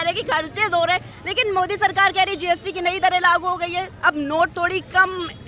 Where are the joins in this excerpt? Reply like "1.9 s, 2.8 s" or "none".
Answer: none